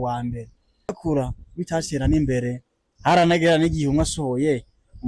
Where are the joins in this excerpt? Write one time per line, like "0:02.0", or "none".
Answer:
0:01.0